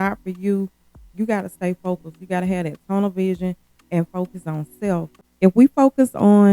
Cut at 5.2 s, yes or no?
yes